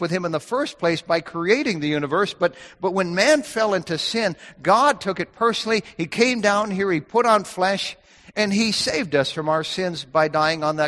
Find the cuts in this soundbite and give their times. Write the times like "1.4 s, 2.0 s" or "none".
none